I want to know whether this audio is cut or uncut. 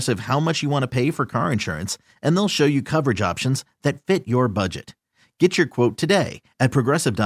uncut